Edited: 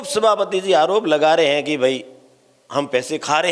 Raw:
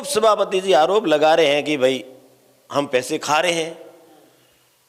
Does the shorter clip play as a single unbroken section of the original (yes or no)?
yes